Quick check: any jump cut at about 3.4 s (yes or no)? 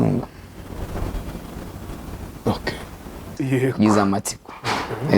yes